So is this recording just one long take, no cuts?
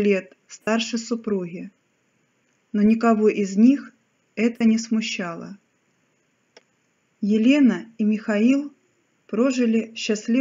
no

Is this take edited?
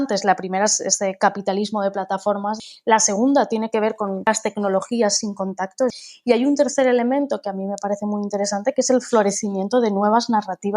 yes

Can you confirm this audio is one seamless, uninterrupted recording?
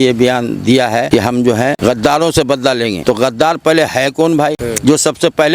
no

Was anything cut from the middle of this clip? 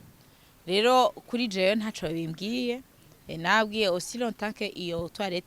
no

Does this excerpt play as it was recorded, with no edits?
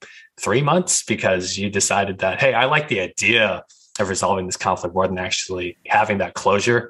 no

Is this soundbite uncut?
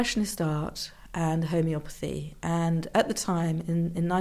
yes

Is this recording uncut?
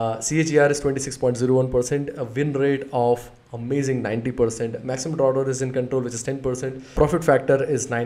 no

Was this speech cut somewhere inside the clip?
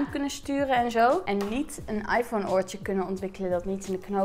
yes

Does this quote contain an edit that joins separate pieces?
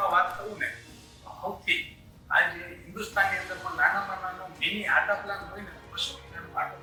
no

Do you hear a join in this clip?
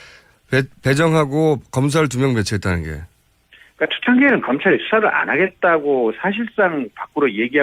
no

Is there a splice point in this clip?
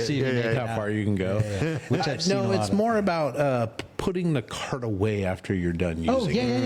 no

